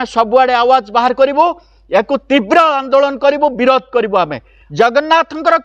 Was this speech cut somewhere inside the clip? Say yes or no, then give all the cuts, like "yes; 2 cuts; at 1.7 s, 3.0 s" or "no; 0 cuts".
yes; 1 cut; at 4.6 s